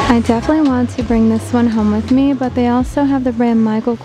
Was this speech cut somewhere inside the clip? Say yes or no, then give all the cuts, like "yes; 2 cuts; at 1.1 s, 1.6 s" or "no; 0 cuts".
no; 0 cuts